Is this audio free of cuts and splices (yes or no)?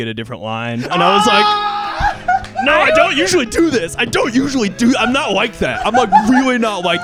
yes